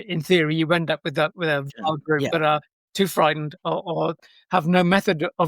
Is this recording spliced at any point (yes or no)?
yes